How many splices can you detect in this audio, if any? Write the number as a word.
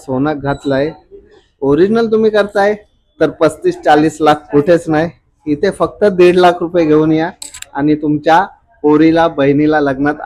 zero